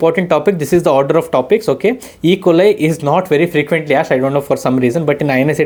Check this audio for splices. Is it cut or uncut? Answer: uncut